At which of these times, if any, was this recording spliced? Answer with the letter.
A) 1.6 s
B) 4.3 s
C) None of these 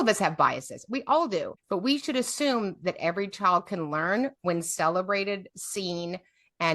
A